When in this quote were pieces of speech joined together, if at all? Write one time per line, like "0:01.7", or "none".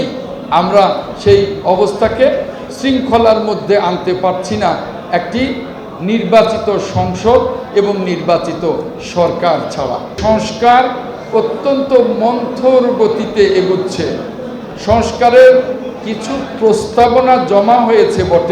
0:10.2